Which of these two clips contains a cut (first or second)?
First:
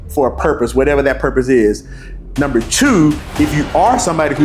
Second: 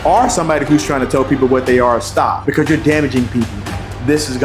second